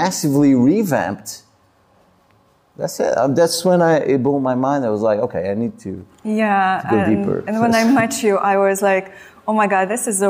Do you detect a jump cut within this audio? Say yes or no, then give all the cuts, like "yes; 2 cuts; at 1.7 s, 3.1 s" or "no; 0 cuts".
no; 0 cuts